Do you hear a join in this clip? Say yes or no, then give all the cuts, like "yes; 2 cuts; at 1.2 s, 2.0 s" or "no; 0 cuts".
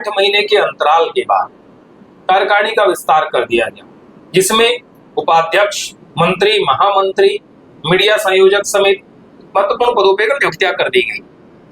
no; 0 cuts